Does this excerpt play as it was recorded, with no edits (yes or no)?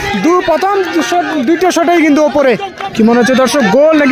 no